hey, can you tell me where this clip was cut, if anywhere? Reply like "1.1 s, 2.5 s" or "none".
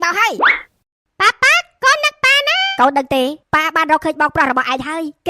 2.7 s